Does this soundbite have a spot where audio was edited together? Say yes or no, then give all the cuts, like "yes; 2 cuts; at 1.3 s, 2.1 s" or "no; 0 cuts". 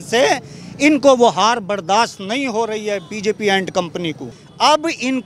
no; 0 cuts